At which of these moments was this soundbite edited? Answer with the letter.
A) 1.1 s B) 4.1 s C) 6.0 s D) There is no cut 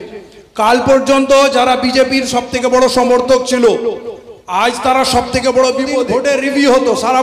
C